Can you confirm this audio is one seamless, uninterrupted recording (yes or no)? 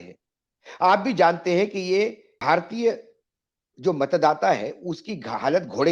no